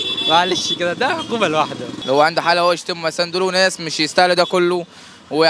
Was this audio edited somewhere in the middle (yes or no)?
yes